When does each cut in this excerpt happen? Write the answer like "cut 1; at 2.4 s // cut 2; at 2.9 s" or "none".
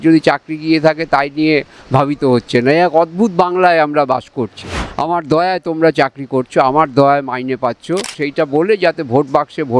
cut 1; at 4.9 s // cut 2; at 8.2 s